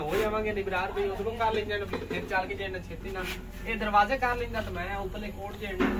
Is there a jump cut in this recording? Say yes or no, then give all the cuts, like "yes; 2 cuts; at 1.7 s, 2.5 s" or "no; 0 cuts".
no; 0 cuts